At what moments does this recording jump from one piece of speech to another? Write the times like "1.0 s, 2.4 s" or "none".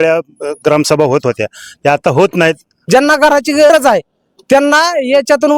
2.7 s, 3.7 s